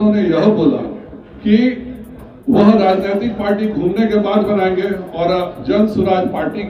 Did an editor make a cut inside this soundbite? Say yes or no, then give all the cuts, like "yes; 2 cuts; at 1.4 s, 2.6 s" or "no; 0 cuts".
no; 0 cuts